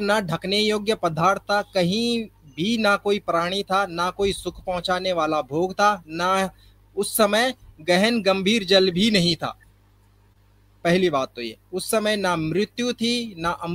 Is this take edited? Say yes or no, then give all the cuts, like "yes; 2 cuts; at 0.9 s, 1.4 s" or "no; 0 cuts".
no; 0 cuts